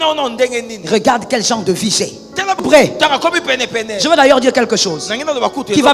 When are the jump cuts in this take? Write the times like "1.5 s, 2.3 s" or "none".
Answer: 2.6 s